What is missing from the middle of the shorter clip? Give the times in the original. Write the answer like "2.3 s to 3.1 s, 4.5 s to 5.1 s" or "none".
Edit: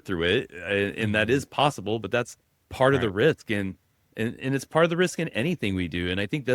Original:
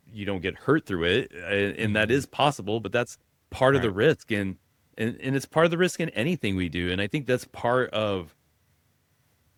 none